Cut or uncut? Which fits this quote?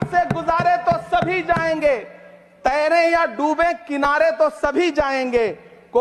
uncut